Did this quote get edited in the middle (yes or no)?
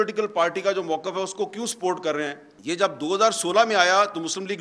yes